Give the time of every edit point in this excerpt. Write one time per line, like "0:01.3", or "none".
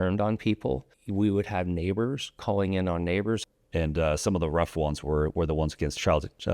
0:01.0
0:03.4